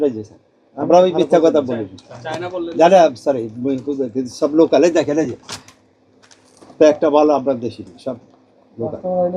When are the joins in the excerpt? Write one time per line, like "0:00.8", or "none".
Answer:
none